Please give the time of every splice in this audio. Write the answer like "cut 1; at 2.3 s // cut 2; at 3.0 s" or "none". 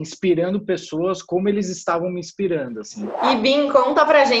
cut 1; at 3.3 s